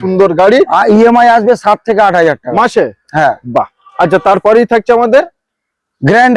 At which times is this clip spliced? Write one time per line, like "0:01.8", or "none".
none